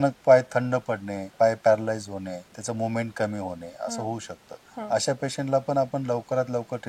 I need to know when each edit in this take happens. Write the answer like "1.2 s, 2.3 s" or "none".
1.3 s, 2.5 s